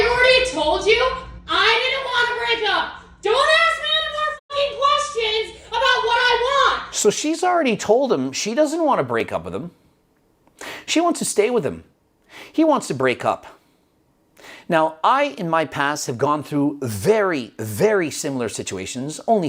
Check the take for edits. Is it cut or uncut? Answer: uncut